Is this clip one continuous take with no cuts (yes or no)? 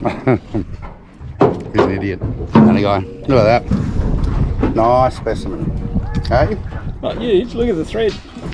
yes